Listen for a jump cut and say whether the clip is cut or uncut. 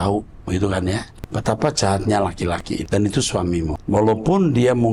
cut